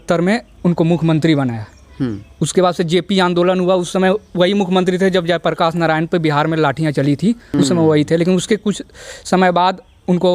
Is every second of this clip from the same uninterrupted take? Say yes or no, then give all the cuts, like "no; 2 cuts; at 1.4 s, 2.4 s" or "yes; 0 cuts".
yes; 0 cuts